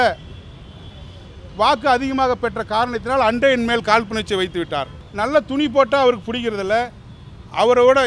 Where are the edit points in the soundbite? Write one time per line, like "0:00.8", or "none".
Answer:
0:05.0